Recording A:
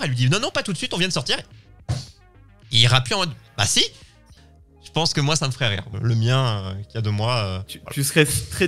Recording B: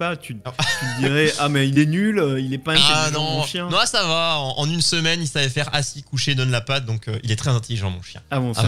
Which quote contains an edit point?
A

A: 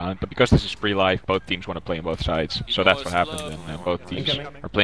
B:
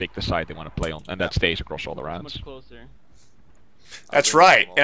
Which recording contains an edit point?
B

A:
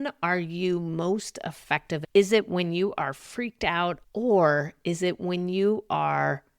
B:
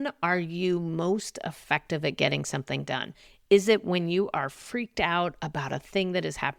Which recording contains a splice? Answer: A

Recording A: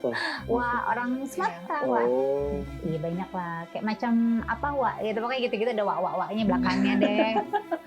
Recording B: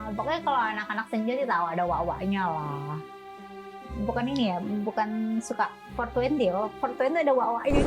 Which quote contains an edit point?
A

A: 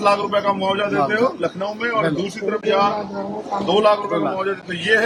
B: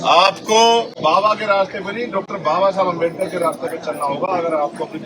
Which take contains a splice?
B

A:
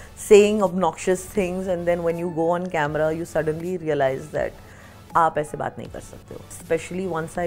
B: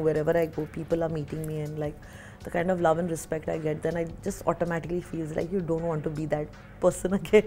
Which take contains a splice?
A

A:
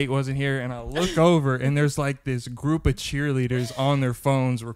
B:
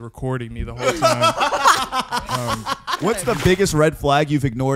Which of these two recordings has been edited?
B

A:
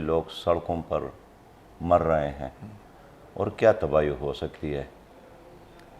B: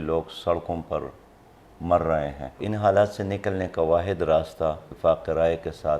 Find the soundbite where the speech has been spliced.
B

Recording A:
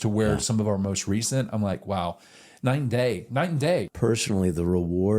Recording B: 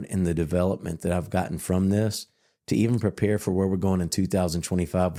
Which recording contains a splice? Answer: A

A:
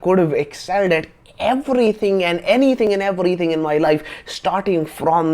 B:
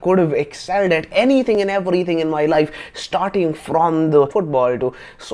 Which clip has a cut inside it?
B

